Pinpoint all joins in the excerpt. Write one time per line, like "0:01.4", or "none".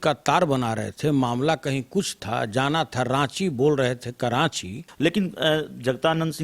0:04.8